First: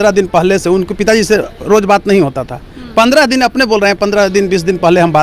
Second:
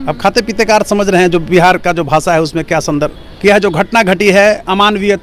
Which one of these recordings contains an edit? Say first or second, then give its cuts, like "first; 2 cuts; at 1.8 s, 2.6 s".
second; 1 cut; at 3.2 s